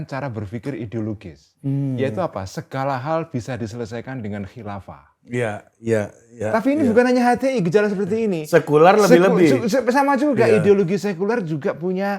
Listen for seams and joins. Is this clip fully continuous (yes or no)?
yes